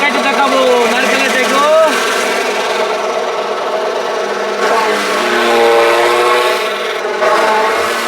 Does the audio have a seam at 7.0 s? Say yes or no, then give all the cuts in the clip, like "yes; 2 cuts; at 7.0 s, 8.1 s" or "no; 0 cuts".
yes; 1 cut; at 7.0 s